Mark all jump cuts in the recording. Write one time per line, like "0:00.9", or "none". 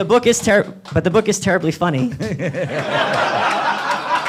none